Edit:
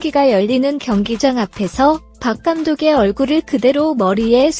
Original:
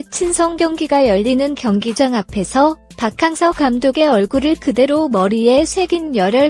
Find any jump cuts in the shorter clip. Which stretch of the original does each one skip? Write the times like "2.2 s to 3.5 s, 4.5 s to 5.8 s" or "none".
3.4 s to 3.8 s